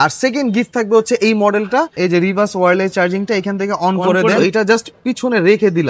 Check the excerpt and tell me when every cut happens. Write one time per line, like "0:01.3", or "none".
0:01.9
0:04.4